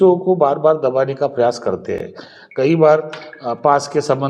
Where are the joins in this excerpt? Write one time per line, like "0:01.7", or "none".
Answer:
none